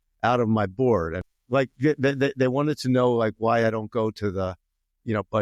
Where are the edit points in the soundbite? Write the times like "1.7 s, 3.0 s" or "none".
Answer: 1.2 s